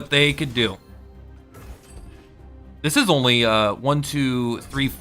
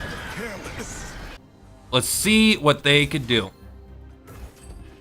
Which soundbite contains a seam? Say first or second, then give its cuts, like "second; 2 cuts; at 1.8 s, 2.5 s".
second; 1 cut; at 1.4 s